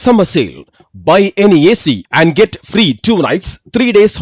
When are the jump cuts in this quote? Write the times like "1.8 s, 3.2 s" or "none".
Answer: none